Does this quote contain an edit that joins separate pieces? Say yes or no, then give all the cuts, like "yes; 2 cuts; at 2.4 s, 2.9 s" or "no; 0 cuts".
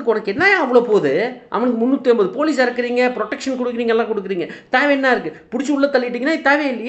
no; 0 cuts